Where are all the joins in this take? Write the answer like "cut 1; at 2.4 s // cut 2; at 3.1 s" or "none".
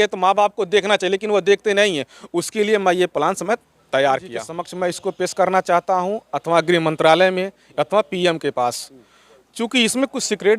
cut 1; at 4.6 s